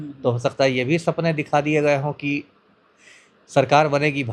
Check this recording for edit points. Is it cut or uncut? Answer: uncut